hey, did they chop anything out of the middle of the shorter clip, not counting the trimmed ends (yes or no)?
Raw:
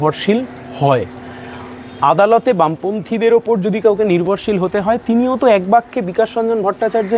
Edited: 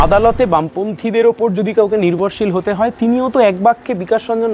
no